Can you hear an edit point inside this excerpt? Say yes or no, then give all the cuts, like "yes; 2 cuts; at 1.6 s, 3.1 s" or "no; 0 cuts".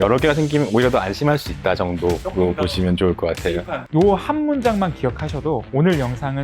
yes; 1 cut; at 3.8 s